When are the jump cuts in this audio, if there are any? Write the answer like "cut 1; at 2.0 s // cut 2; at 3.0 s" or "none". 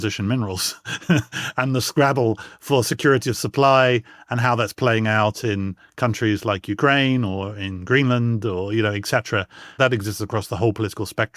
none